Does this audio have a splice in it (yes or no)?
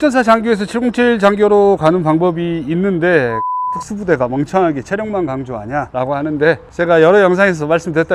yes